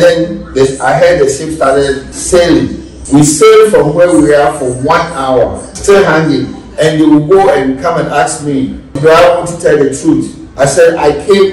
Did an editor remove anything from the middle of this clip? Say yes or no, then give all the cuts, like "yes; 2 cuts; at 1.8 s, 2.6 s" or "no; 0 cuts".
yes; 5 cuts; at 2.1 s, 2.9 s, 5.7 s, 8.9 s, 10.4 s